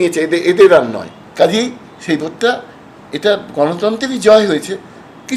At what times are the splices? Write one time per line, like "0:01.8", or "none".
0:01.2